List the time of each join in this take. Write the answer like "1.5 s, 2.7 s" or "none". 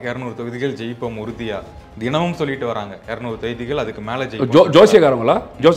none